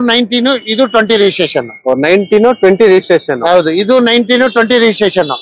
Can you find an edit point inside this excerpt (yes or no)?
no